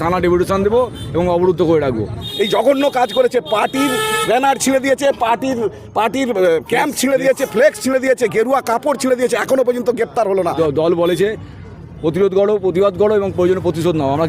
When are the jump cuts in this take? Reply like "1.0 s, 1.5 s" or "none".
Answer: 2.2 s, 10.6 s